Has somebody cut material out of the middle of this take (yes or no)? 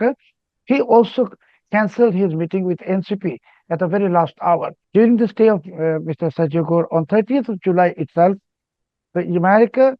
yes